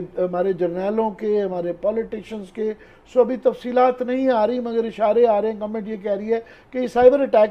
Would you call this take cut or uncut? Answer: uncut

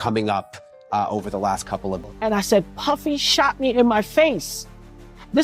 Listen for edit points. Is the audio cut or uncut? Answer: cut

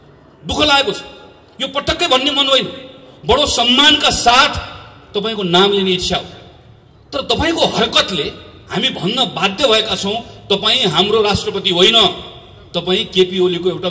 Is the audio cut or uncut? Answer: uncut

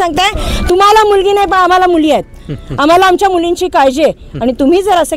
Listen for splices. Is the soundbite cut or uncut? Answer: uncut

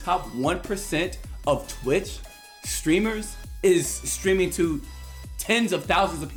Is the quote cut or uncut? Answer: uncut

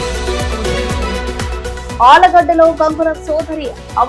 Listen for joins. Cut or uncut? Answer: cut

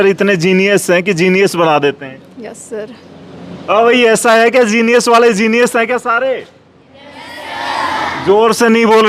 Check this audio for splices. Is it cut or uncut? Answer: uncut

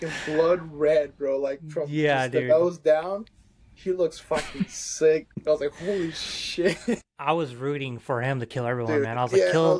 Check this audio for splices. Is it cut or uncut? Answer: cut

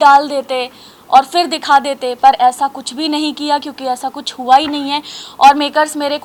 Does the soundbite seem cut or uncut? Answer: uncut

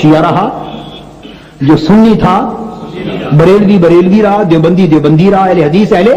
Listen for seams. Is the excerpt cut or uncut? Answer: uncut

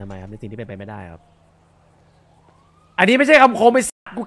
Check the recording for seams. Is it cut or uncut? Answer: uncut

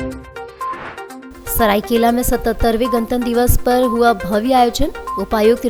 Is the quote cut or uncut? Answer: uncut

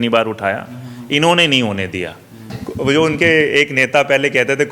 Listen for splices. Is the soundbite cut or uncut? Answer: cut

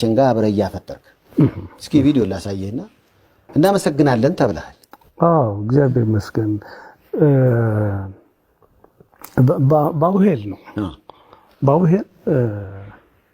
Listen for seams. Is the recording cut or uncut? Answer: uncut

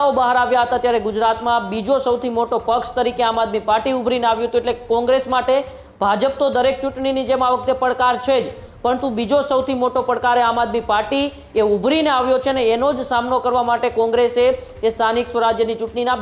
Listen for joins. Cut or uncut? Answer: uncut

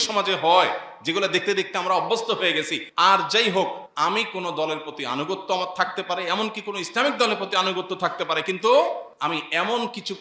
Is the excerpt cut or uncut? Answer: cut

